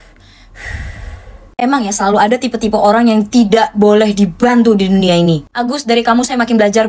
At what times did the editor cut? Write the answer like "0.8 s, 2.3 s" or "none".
none